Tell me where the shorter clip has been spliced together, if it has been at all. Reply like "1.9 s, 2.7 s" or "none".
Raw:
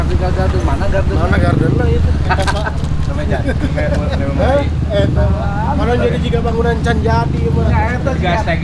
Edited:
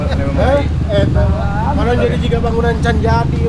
none